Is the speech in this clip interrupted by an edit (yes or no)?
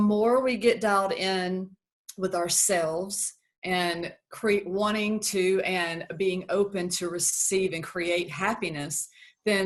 no